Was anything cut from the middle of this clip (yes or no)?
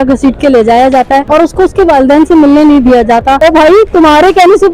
yes